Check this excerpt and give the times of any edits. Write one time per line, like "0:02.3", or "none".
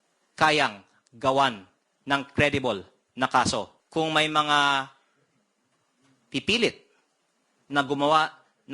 0:03.8